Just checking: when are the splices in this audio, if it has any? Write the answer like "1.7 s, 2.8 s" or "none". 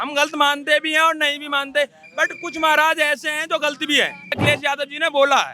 4.4 s